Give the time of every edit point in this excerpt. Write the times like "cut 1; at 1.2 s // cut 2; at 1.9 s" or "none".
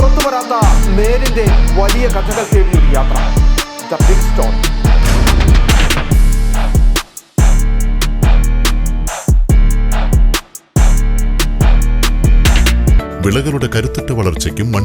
cut 1; at 13.0 s